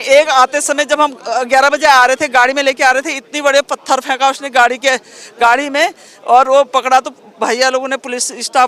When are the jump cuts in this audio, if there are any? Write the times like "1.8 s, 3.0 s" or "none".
none